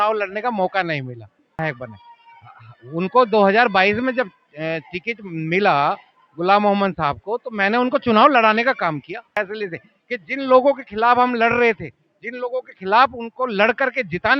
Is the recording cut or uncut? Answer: cut